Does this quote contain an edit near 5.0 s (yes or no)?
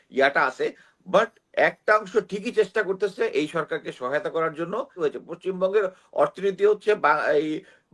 yes